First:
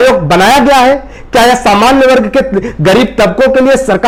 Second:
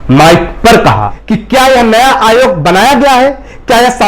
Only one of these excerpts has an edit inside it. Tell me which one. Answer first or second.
second